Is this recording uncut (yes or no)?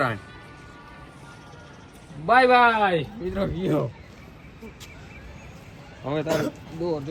yes